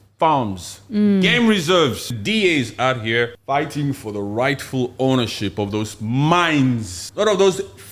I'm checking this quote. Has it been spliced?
yes; 3 cuts; at 2.1 s, 3.4 s, 7.0 s

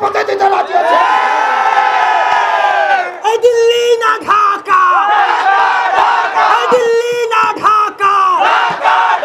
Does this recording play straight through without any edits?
yes; 0 cuts

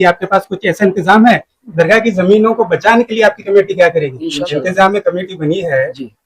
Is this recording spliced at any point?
yes; 2 cuts; at 1.5 s, 4.2 s

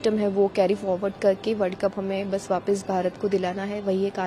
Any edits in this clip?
no; 0 cuts

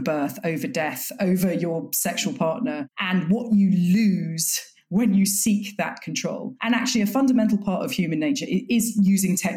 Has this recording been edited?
no; 0 cuts

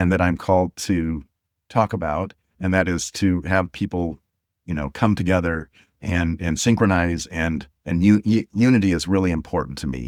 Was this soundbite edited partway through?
no; 0 cuts

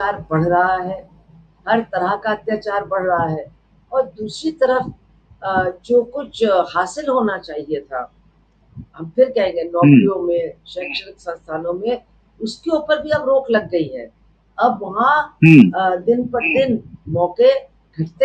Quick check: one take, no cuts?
yes; 0 cuts

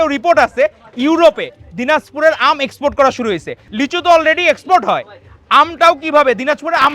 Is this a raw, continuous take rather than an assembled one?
no; 1 cut; at 3.6 s

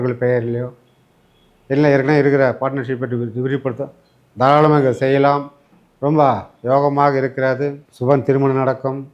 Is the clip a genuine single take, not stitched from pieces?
no; 1 cut; at 7.9 s

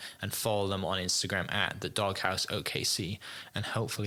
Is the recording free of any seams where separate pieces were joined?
yes; 0 cuts

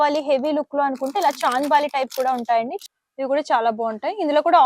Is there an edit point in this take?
yes; 1 cut; at 2.8 s

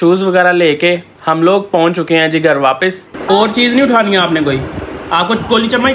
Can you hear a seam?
yes; 2 cuts; at 1.1 s, 3.1 s

